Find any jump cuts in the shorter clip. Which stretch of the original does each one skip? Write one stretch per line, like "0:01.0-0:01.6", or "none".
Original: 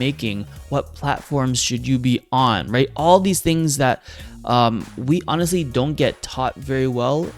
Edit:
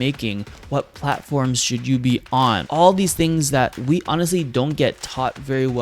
0:02.7-0:02.9
0:04.0-0:05.0